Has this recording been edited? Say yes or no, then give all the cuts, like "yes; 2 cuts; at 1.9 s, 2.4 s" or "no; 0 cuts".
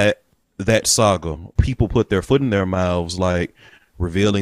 yes; 1 cut; at 1.5 s